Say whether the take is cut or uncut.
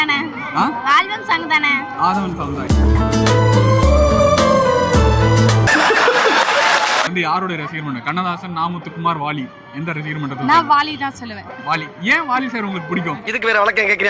cut